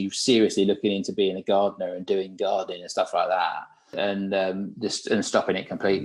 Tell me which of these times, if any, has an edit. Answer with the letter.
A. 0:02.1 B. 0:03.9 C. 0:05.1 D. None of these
B